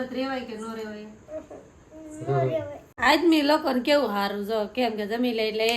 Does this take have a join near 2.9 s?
yes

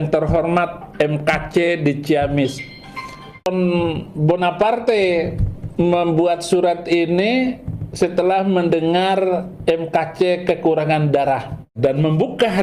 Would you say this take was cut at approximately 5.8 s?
no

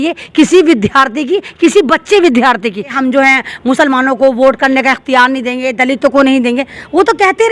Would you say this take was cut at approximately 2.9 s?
yes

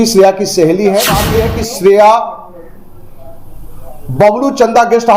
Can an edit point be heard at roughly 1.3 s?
yes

